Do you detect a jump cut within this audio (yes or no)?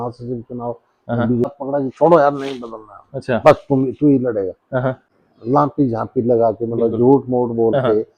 yes